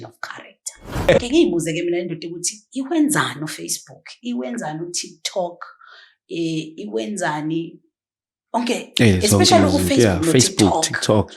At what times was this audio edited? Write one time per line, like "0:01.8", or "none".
0:01.2